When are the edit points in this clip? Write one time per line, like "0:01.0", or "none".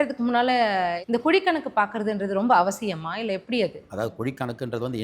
0:01.0
0:03.8